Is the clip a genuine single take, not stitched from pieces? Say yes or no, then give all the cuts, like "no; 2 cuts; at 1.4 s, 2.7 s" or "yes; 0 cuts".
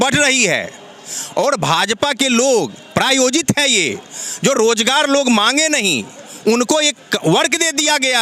yes; 0 cuts